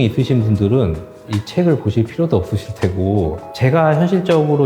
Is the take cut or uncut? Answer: cut